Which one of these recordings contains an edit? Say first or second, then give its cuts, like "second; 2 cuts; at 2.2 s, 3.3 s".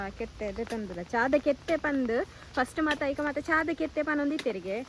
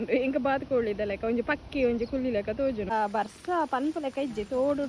second; 1 cut; at 2.9 s